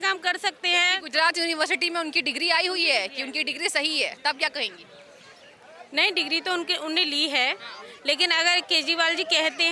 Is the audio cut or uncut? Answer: uncut